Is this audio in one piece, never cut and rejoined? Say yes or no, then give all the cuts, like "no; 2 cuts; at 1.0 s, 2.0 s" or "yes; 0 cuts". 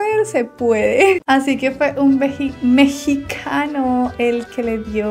no; 1 cut; at 1.2 s